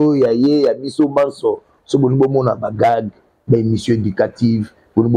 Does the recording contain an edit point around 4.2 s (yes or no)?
no